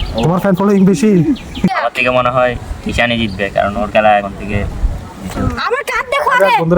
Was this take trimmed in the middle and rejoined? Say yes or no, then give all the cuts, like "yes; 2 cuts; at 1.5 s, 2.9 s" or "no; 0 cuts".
yes; 1 cut; at 1.7 s